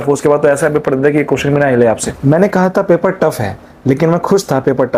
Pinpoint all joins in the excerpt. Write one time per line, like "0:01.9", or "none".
0:02.1

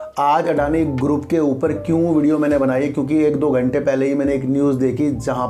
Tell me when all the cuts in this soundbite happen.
none

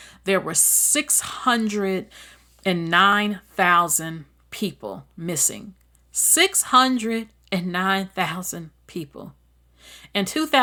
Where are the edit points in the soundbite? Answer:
none

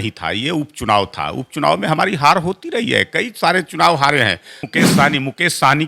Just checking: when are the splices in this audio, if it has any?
0:04.7

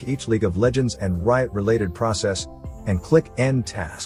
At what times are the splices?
none

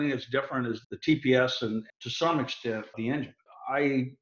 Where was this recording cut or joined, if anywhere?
0:00.8
0:01.9
0:03.0

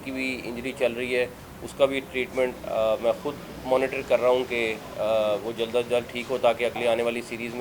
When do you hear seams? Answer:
none

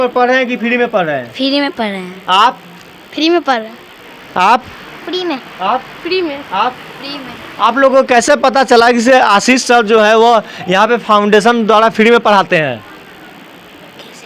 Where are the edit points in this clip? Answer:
none

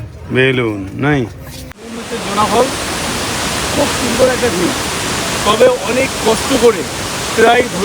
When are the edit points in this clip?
0:02.1

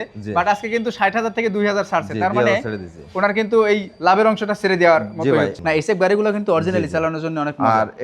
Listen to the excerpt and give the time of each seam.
0:05.6

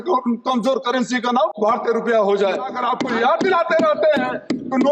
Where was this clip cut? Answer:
0:01.5
0:02.7

